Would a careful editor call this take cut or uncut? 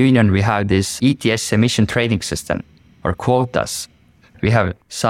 cut